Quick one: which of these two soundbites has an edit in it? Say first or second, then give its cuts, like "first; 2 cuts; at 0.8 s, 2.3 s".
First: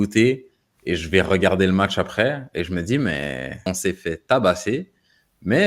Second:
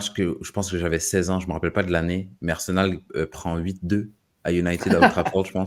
first; 1 cut; at 3.6 s